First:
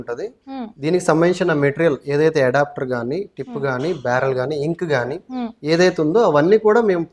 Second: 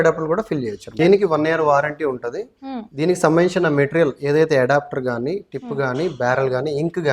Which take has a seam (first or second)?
second